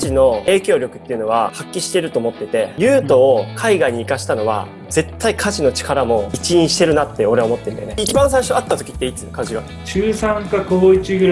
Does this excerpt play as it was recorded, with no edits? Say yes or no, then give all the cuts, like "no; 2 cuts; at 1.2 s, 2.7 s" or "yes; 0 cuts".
no; 3 cuts; at 2.7 s, 7.8 s, 9.8 s